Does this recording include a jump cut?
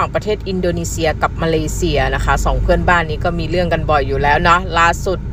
no; 0 cuts

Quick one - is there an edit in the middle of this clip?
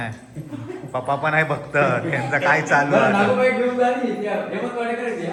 no; 0 cuts

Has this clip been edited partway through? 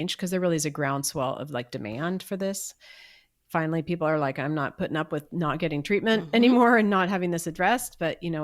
no; 0 cuts

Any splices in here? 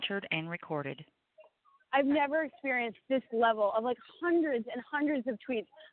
no; 0 cuts

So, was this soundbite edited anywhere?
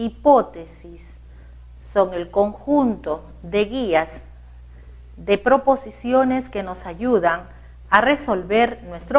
yes; 1 cut; at 0.9 s

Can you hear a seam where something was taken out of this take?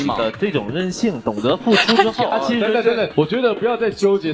yes; 1 cut; at 2.3 s

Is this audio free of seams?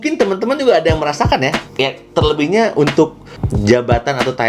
no; 1 cut; at 1.6 s

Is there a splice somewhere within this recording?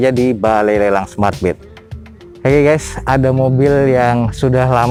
no; 0 cuts

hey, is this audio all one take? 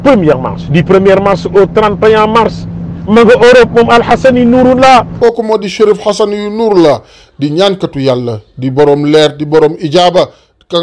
yes; 0 cuts

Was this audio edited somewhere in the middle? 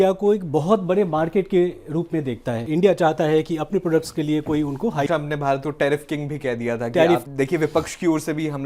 yes; 3 cuts; at 2.6 s, 5.0 s, 7.2 s

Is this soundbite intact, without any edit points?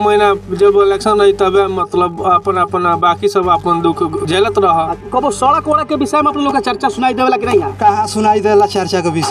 no; 2 cuts; at 4.3 s, 4.9 s

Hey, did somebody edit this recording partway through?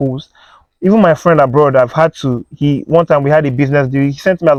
no; 0 cuts

